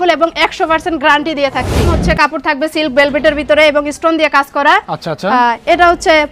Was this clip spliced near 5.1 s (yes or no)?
no